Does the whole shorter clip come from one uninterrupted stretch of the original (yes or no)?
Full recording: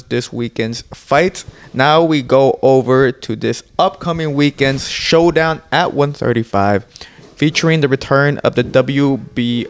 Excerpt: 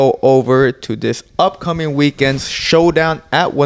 yes